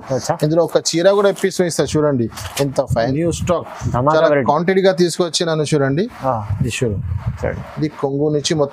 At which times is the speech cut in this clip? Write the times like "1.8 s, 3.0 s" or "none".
3.0 s